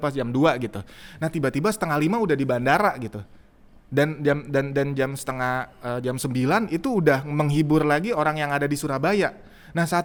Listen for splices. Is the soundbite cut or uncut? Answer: uncut